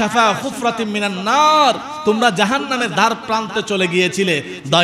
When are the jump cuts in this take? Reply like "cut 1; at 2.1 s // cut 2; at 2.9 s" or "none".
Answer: none